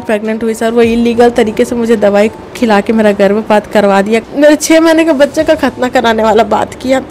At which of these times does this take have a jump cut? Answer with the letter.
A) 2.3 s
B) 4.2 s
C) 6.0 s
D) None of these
B